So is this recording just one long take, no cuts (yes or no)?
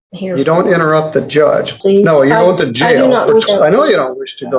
no